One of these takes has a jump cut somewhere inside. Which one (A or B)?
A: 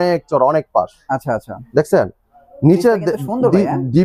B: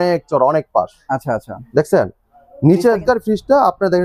B